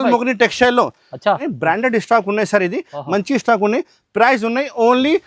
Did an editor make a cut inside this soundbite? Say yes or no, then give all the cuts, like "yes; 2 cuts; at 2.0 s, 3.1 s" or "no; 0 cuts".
yes; 1 cut; at 1.5 s